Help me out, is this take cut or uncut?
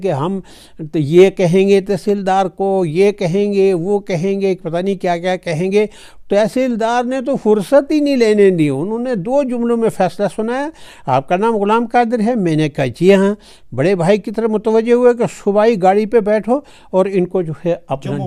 uncut